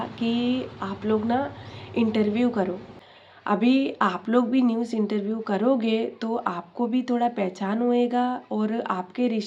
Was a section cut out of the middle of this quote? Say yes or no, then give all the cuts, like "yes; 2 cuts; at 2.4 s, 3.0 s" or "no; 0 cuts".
no; 0 cuts